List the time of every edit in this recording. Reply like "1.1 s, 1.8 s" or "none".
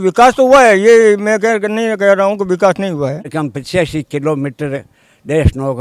3.3 s